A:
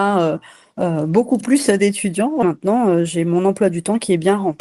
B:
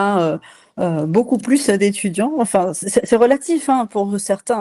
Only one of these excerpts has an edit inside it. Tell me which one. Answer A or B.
A